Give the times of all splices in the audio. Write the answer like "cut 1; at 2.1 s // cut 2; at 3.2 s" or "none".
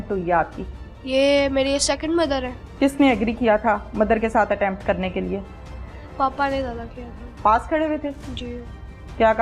cut 1; at 2.6 s